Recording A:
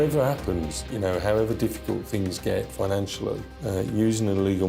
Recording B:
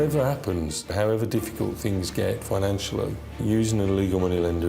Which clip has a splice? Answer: B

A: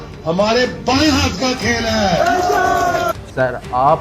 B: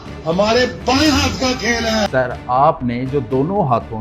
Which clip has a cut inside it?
B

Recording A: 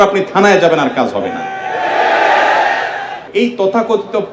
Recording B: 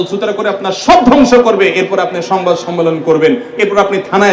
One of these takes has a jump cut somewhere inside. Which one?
A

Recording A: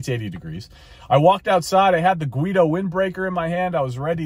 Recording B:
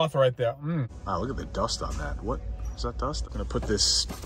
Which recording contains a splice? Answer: B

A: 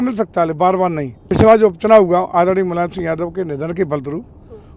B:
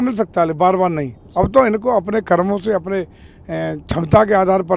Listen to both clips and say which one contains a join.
A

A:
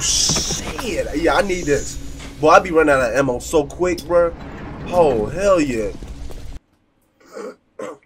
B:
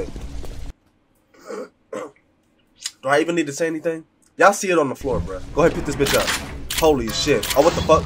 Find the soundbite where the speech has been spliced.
B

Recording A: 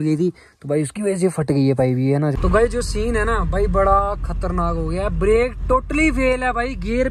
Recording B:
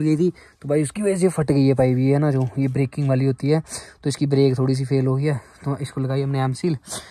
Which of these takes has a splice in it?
A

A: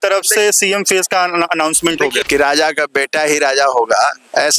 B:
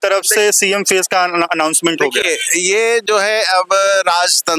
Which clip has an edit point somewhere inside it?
A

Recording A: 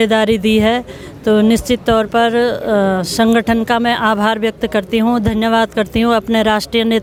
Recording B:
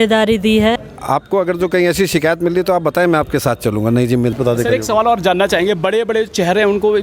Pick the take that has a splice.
B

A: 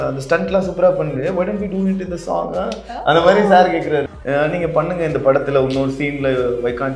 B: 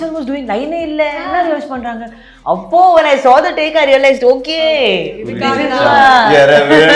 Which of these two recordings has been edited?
A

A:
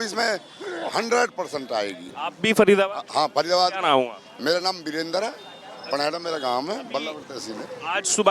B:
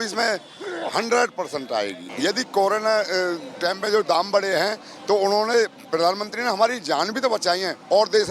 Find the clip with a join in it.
B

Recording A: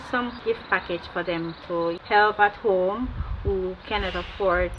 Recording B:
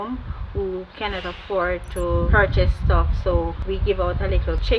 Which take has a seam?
A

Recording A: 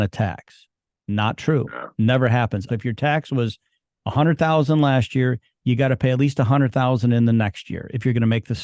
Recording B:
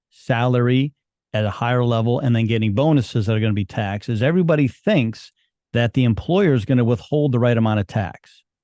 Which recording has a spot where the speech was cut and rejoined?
A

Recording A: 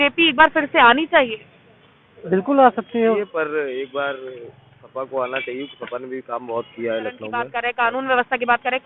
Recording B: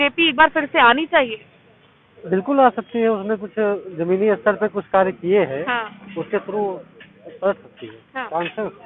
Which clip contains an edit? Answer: A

